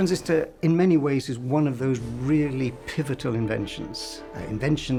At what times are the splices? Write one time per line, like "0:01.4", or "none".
none

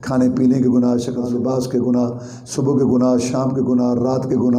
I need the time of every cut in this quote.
0:01.2

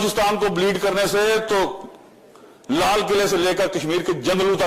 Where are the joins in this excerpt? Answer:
none

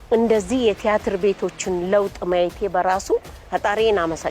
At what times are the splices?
0:03.4

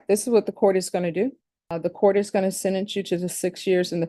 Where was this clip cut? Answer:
0:01.7

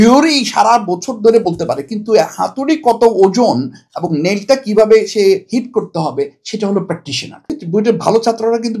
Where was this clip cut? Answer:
0:07.6

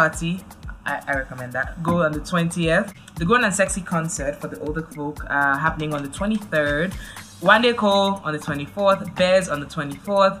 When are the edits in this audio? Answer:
0:03.0

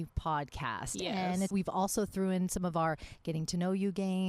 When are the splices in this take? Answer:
0:01.5

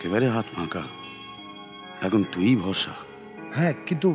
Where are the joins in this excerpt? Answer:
none

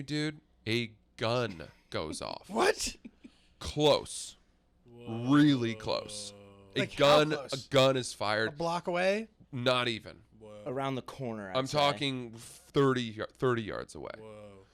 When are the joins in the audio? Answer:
none

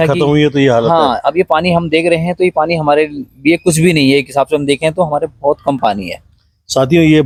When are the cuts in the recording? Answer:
none

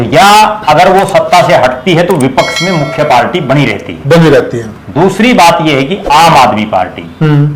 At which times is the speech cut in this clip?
none

